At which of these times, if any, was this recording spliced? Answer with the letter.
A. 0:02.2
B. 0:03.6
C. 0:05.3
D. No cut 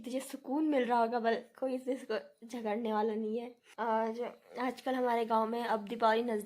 B